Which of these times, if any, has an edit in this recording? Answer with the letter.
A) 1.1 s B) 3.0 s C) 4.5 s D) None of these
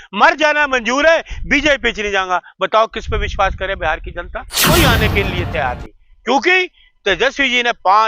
C